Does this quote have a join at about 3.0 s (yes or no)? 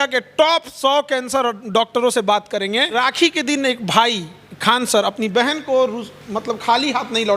yes